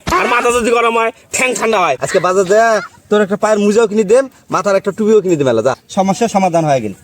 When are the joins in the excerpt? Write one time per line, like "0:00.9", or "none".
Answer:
0:02.0
0:05.8